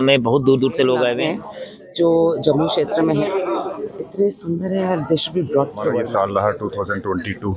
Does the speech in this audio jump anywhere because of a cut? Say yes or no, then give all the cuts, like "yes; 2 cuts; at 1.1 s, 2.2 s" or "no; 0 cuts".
yes; 2 cuts; at 1.2 s, 6.0 s